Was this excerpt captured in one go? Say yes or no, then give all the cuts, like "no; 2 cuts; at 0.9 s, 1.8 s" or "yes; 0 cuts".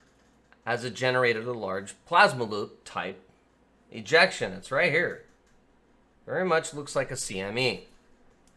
yes; 0 cuts